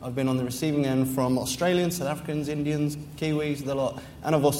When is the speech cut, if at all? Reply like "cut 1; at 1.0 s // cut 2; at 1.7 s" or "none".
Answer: none